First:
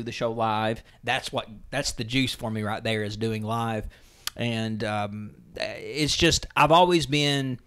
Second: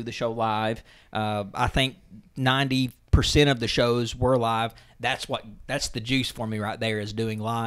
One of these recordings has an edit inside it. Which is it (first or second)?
first